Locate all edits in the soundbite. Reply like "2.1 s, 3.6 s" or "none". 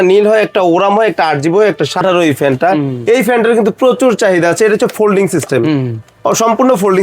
2.0 s